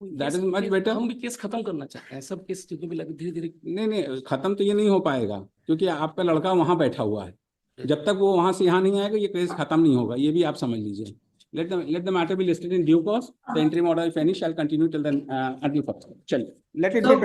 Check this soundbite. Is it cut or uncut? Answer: uncut